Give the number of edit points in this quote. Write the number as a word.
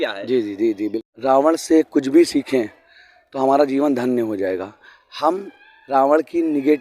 one